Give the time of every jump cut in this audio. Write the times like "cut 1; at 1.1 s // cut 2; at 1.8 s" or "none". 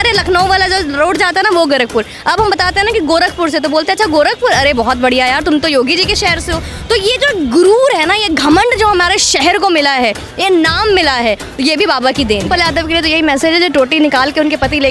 cut 1; at 12.5 s